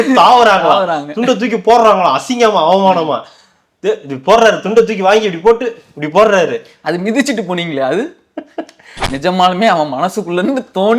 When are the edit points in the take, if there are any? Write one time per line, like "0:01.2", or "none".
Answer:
0:08.9